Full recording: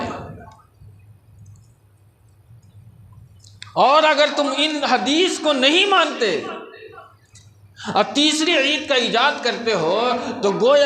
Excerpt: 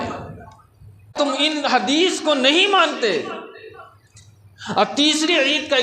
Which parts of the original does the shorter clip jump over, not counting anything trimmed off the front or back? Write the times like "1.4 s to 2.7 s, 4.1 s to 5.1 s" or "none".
1.1 s to 4.3 s